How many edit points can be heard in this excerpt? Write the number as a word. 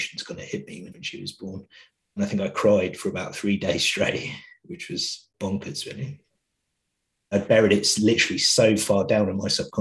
three